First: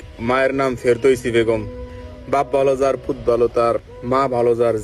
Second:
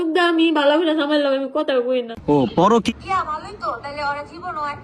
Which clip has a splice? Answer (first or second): second